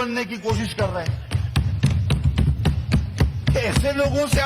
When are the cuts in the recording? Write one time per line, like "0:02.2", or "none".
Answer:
none